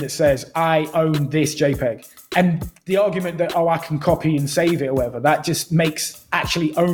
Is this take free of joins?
no; 1 cut; at 2.1 s

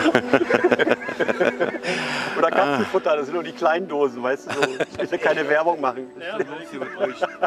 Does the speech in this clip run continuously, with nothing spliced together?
yes; 0 cuts

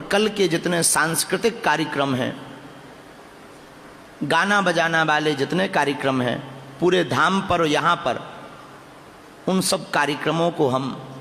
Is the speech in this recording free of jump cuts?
yes; 0 cuts

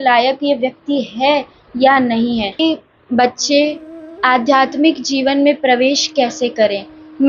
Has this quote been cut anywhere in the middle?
yes; 1 cut; at 2.6 s

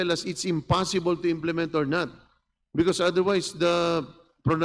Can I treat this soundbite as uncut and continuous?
yes; 0 cuts

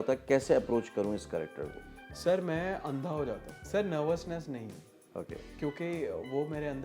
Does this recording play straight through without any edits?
no; 1 cut; at 3.5 s

